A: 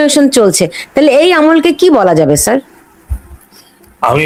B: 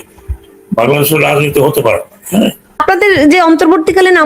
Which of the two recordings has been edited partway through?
B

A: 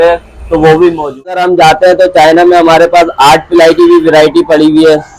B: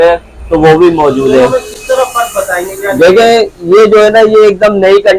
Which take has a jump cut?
A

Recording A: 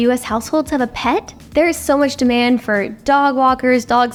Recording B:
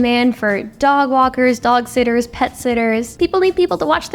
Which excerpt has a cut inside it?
B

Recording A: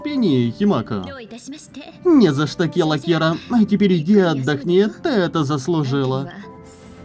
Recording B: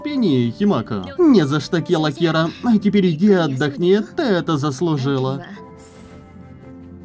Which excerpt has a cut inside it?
B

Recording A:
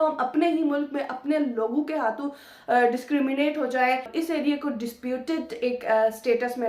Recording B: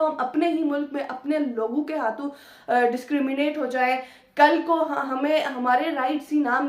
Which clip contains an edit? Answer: A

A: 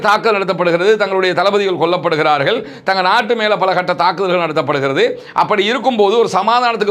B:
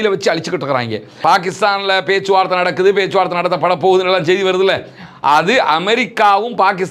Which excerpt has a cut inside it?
B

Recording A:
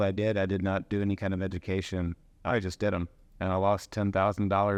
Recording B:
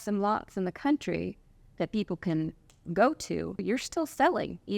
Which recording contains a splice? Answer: B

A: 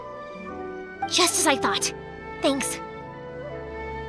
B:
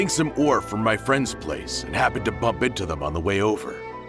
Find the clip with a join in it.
A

